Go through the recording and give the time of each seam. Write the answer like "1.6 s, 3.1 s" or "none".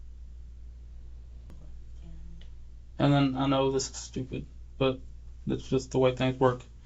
1.5 s